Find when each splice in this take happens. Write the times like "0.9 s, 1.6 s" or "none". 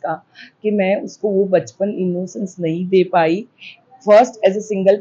none